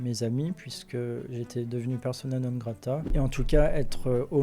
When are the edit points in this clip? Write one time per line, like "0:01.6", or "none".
0:03.0